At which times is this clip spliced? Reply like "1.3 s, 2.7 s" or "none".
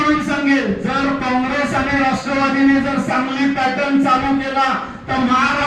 none